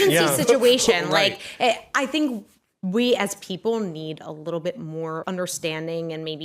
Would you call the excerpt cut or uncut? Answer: cut